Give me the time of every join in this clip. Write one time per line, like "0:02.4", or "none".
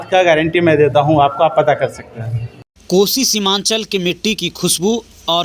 none